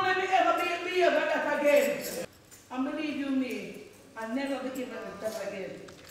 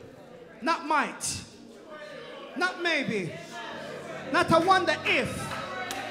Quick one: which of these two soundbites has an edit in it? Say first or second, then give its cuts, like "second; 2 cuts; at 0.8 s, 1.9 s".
first; 1 cut; at 2.2 s